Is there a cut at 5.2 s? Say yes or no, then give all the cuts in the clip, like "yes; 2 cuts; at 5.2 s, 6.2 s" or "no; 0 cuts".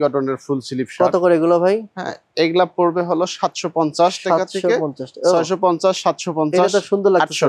no; 0 cuts